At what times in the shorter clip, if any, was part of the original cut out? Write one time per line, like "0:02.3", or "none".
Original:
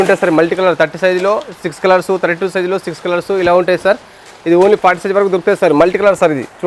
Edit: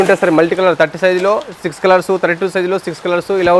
none